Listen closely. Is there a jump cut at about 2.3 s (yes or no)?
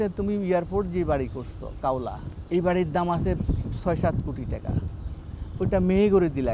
yes